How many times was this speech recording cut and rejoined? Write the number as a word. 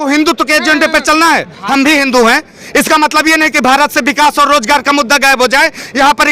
one